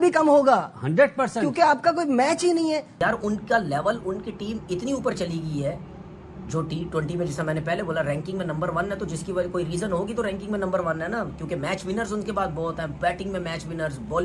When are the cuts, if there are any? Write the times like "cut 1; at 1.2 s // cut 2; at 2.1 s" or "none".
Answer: cut 1; at 2.9 s